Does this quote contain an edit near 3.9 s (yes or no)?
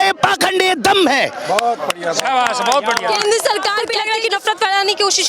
yes